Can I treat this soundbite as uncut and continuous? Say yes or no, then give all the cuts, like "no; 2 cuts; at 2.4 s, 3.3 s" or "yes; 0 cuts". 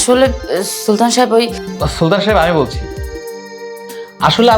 no; 1 cut; at 3.0 s